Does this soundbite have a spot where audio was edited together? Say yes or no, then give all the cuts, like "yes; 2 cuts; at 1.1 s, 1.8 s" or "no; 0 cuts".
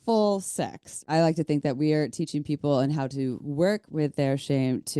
yes; 1 cut; at 1.1 s